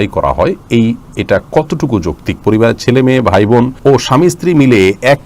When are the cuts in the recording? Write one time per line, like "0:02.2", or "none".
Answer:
0:02.4
0:03.7